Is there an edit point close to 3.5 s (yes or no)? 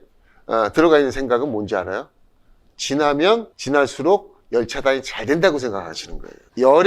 yes